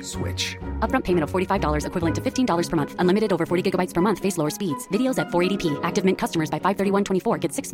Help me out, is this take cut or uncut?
uncut